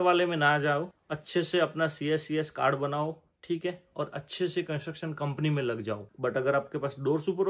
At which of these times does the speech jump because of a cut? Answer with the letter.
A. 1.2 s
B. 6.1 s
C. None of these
B